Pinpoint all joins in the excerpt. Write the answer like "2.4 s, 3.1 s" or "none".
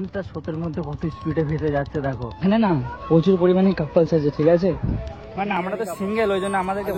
2.4 s

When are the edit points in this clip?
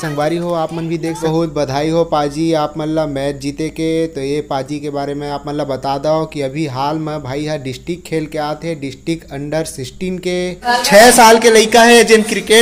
1.2 s, 10.6 s

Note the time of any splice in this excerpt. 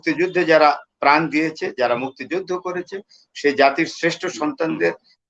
none

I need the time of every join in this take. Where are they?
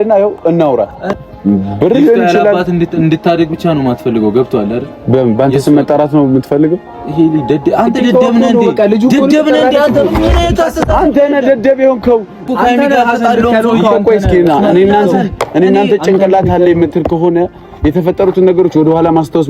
1.1 s, 12.5 s

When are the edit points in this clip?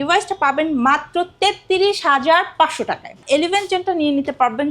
3.2 s

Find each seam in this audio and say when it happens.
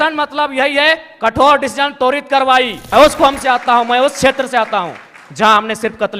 2.8 s

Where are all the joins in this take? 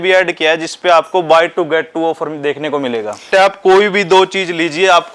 3.3 s

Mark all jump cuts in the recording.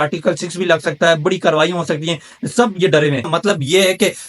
3.3 s

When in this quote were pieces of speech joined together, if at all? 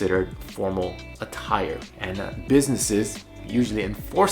1.9 s

